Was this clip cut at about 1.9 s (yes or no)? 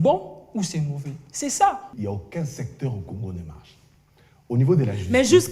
yes